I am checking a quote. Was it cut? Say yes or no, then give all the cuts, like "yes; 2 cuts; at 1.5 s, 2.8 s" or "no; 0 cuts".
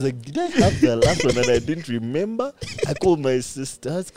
no; 0 cuts